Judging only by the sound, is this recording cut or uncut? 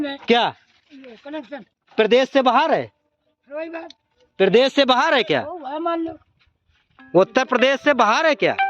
uncut